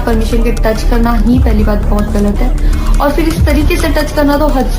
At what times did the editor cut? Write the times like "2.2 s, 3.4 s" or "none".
none